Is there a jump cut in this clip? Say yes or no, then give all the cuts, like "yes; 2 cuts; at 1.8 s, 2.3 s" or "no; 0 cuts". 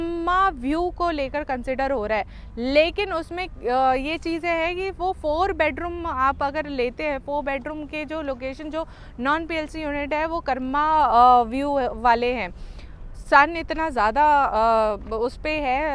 no; 0 cuts